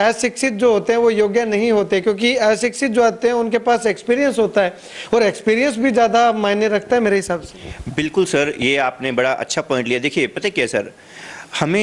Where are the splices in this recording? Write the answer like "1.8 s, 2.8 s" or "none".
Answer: none